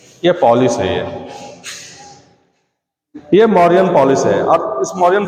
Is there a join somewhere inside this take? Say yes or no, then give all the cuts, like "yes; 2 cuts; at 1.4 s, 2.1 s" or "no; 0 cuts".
no; 0 cuts